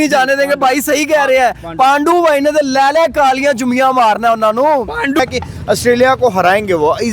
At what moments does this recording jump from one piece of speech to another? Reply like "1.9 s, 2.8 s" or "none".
5.2 s